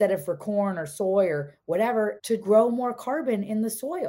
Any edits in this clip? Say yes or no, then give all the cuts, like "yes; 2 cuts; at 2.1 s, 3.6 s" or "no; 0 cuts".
yes; 1 cut; at 2.3 s